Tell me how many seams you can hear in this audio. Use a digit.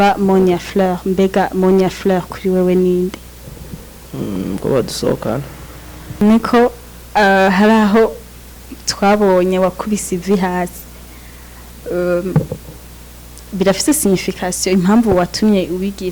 1